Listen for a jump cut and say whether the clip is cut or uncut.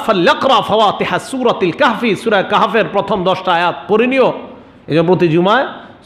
uncut